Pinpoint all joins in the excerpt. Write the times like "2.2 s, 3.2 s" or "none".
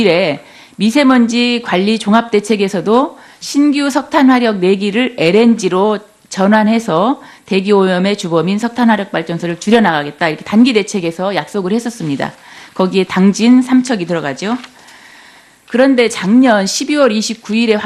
3.7 s